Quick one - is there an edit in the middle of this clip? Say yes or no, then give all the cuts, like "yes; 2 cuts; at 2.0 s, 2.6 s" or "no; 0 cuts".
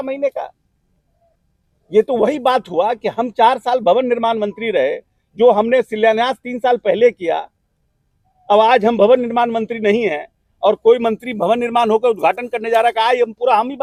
no; 0 cuts